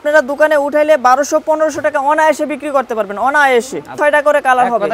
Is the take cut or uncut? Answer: cut